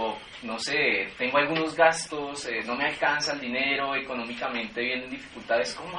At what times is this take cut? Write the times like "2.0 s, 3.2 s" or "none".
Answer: 3.7 s